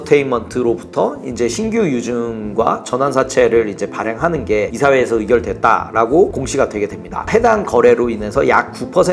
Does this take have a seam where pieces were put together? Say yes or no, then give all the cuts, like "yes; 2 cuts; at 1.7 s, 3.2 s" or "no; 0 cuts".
yes; 1 cut; at 7.3 s